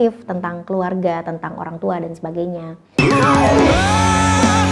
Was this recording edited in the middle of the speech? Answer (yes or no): yes